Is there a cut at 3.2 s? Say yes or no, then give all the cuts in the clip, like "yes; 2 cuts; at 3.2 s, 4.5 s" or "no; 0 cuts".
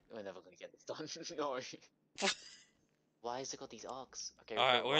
yes; 1 cut; at 3.2 s